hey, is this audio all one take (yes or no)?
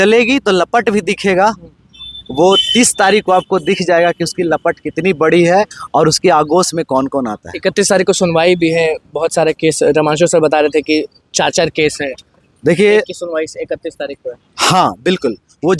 yes